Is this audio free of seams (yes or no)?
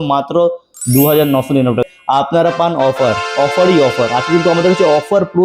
no